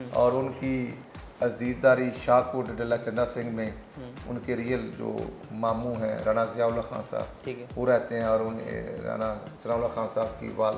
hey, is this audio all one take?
yes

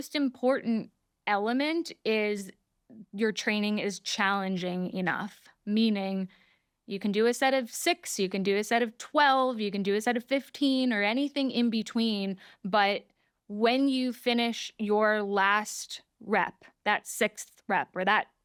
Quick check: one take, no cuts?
yes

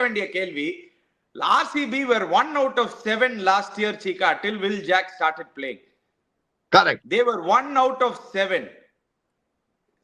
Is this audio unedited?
yes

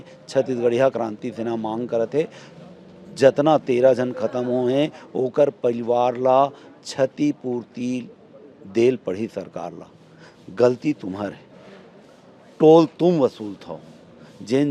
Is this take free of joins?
yes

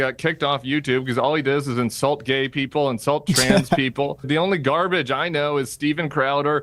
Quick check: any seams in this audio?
yes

